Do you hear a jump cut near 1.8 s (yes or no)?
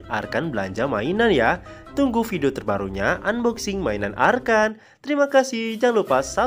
no